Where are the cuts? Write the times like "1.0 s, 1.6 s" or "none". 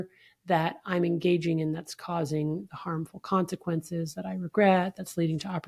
none